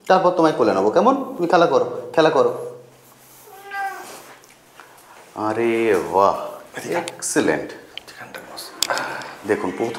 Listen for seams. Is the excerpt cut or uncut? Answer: uncut